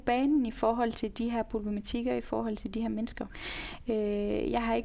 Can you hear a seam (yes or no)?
yes